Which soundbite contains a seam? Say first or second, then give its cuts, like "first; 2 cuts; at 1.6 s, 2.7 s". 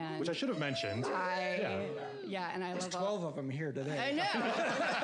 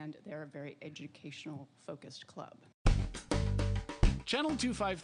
second; 1 cut; at 2.8 s